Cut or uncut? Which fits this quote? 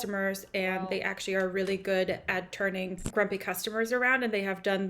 cut